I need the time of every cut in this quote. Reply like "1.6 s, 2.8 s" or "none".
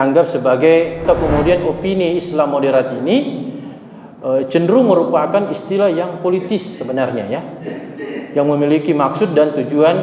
1.0 s